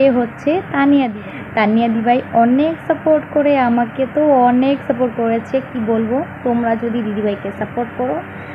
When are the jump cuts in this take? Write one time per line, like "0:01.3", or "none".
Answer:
0:01.1